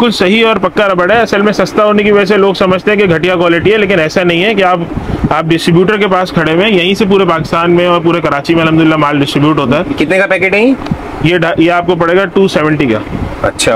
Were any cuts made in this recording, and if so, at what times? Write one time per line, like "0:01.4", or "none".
none